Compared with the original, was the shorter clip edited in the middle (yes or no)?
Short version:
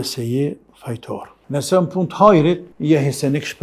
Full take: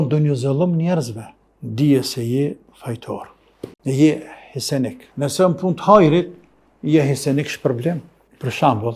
yes